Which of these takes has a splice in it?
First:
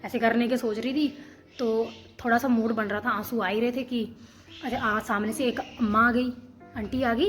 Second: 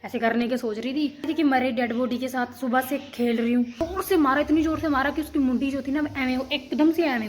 second; 2 cuts; at 1.3 s, 3.8 s

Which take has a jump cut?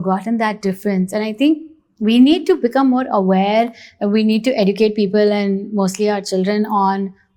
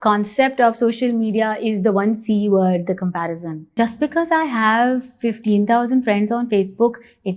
second; 1 cut; at 3.7 s

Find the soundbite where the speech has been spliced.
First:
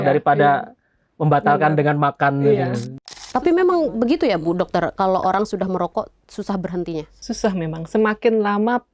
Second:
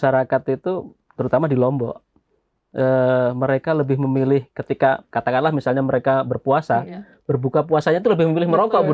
first; 1 cut; at 2.9 s

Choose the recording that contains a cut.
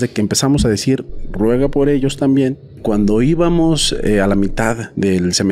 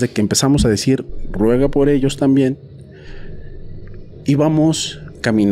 first; 1 cut; at 2.8 s

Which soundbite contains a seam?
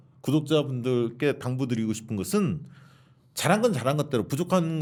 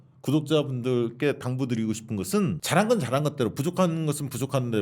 second; 1 cut; at 2.6 s

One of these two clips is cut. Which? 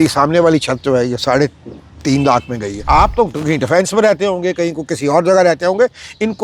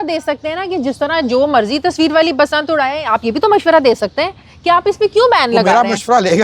first; 1 cut; at 2.8 s

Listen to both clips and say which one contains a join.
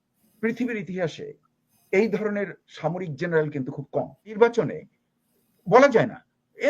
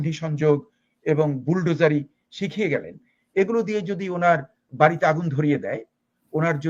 first; 1 cut; at 4.3 s

